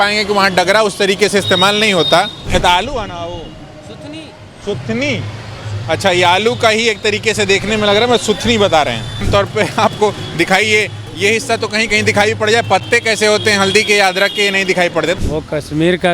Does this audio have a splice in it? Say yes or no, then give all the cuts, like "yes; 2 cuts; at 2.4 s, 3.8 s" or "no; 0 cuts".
yes; 3 cuts; at 2.5 s, 9.2 s, 15.2 s